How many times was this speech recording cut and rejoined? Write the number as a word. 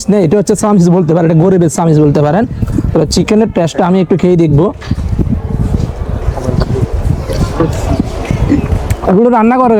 zero